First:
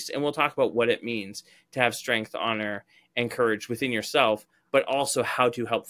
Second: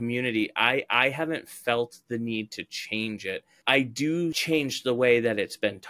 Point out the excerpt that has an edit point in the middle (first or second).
second